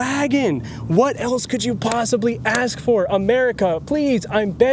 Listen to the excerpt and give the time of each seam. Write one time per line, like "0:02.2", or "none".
none